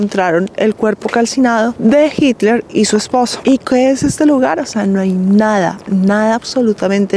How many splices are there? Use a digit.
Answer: 0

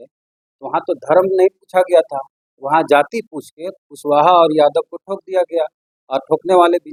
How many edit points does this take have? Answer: 0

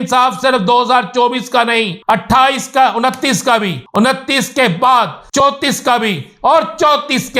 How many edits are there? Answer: 3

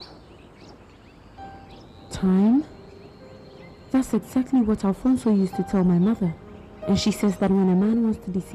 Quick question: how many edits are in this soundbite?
1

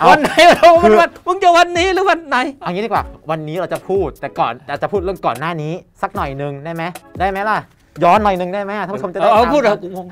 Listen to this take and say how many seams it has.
0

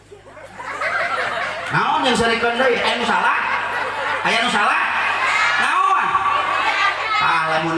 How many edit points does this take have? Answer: 0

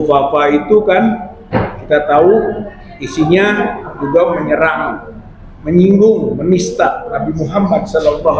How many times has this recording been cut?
0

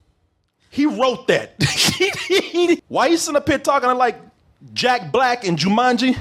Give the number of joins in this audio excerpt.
1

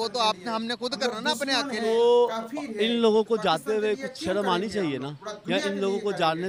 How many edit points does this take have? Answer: 0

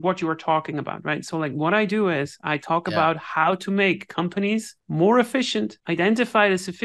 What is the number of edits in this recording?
2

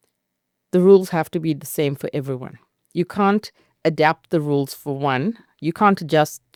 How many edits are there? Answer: 0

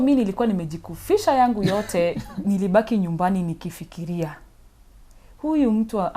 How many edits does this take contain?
1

